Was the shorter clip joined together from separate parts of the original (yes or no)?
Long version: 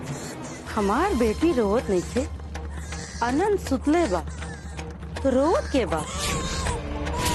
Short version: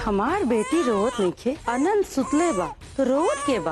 yes